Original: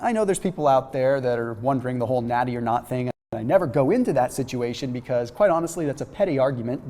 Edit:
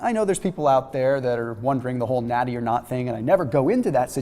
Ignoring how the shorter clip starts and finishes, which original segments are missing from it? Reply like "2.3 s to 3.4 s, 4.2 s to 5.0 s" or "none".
3.1 s to 3.3 s

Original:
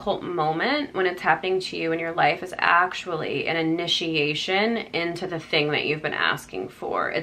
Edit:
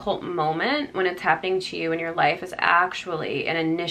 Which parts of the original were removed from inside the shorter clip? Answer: none

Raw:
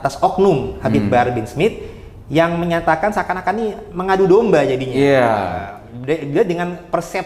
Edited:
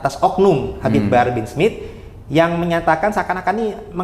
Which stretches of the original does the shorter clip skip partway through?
none

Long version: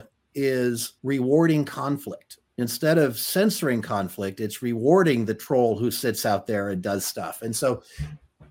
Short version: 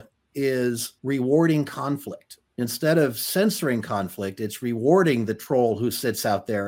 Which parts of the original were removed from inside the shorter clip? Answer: none

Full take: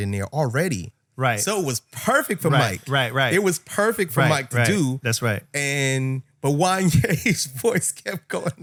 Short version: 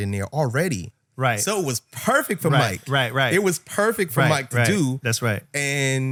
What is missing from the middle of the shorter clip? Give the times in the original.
none

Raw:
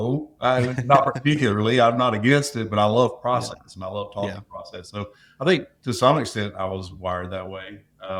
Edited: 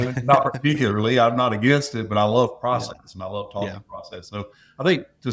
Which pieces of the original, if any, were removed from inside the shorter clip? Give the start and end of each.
none

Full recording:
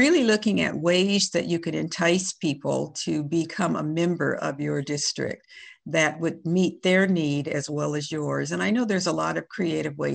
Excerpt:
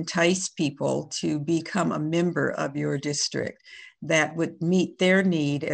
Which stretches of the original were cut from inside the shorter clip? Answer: none

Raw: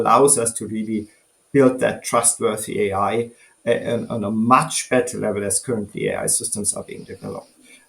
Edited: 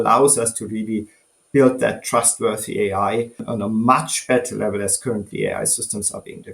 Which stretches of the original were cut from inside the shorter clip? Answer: 3.5 s to 4.1 s

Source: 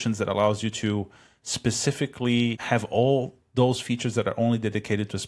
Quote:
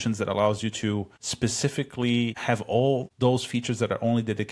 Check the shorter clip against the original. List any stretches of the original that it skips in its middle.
1.2 s to 1.4 s, 3.3 s to 3.5 s

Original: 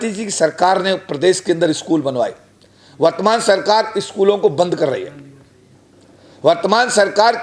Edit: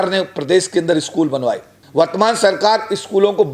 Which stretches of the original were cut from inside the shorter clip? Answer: 2.5 s to 2.8 s

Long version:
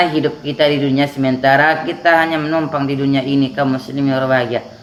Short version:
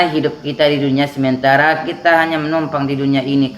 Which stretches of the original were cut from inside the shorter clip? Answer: none

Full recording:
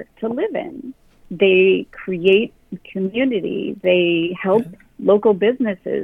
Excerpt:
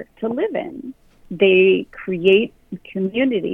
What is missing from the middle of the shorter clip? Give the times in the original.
none

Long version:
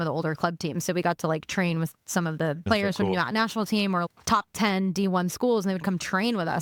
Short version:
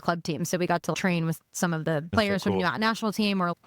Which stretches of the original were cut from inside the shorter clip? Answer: 1.3 s to 1.5 s

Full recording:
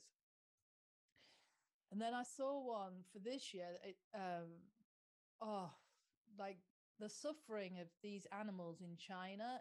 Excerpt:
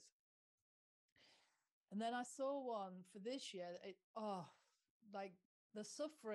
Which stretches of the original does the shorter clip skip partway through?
4.0 s to 5.3 s

